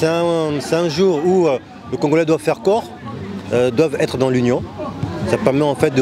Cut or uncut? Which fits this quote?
uncut